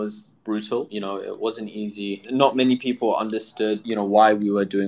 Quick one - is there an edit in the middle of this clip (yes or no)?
yes